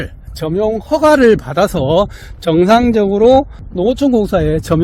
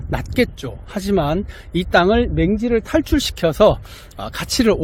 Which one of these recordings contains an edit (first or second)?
first